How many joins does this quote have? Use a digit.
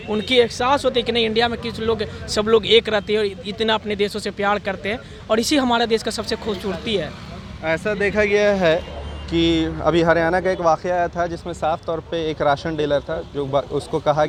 0